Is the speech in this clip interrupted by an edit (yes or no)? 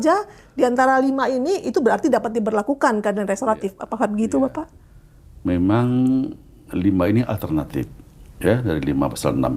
no